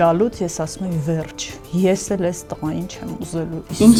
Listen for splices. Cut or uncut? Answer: uncut